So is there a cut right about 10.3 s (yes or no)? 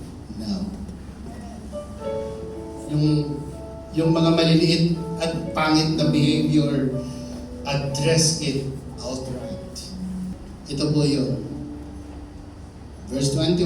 yes